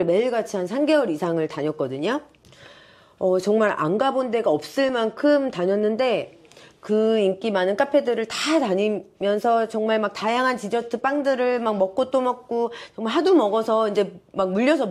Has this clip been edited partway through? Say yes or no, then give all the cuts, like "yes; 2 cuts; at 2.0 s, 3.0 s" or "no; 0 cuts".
no; 0 cuts